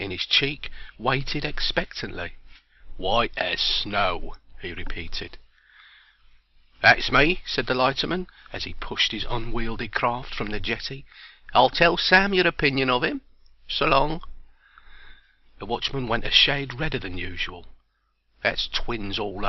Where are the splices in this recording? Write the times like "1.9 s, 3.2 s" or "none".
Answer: 14.1 s